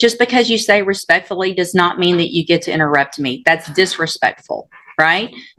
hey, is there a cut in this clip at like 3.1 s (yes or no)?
no